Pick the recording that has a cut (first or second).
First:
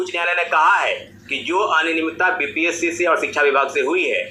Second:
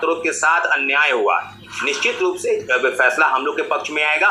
second